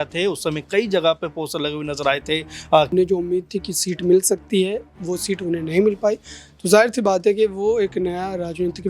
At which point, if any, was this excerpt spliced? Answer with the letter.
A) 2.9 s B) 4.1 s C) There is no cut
A